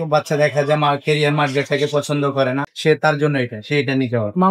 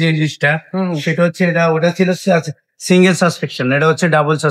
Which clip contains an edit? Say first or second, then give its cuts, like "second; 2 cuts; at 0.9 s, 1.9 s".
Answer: first; 1 cut; at 2.7 s